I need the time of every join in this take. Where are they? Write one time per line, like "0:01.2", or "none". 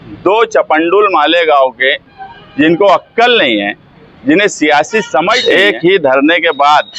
0:05.4